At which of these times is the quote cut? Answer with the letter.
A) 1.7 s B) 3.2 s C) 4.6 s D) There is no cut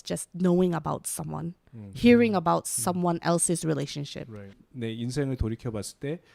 C